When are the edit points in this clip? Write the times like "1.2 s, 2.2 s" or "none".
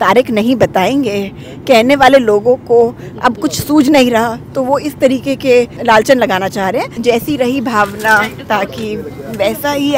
5.8 s, 7.0 s